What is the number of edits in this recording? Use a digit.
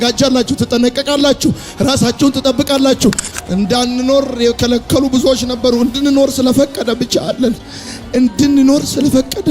1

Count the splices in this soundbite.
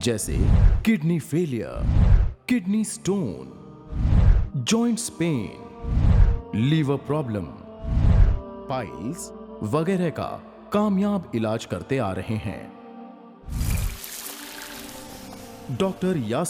1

